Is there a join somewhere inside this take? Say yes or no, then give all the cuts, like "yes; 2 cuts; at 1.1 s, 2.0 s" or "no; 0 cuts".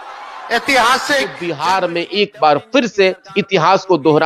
yes; 1 cut; at 1.5 s